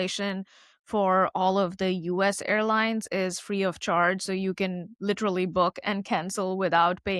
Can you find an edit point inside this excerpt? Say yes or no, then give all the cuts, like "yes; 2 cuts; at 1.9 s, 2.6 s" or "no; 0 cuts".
no; 0 cuts